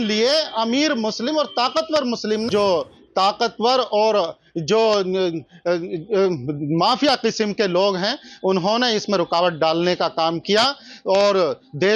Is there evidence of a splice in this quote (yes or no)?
yes